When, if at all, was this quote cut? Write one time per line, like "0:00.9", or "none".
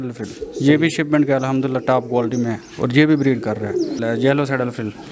0:04.0